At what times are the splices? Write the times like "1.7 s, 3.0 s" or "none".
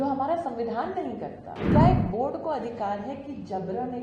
1.7 s